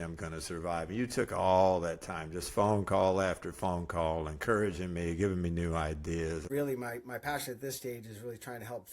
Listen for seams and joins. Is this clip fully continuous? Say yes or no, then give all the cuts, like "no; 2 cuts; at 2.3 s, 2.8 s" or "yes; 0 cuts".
no; 1 cut; at 6.5 s